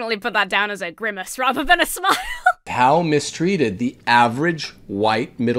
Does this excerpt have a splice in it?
yes; 1 cut; at 2.7 s

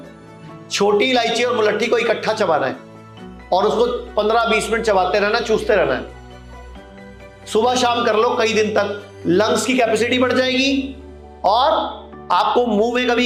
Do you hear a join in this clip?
no; 0 cuts

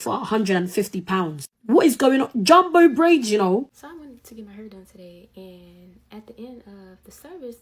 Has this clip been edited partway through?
yes; 1 cut; at 3.7 s

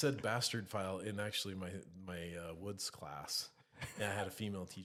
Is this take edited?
no; 0 cuts

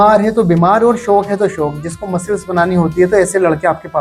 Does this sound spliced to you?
no; 0 cuts

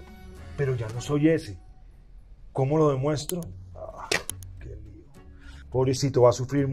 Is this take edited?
no; 0 cuts

